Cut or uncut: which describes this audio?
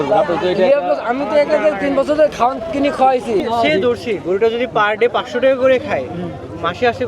cut